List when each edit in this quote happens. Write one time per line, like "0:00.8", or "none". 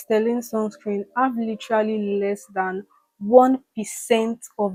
none